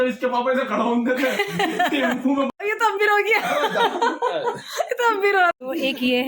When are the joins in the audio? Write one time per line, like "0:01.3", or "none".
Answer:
0:02.5
0:05.5